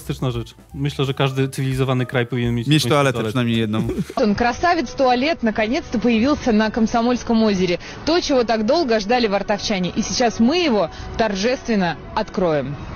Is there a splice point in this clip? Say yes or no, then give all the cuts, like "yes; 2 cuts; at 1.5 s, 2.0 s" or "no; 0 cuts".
no; 0 cuts